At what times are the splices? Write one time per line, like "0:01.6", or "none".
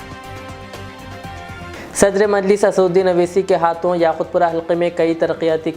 0:01.7